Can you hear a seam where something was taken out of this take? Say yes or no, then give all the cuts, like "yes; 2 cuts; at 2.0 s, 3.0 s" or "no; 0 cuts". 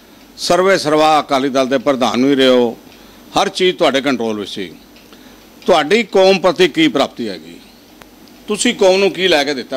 no; 0 cuts